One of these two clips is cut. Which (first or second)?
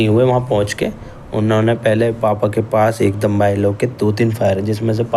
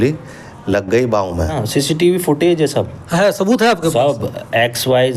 second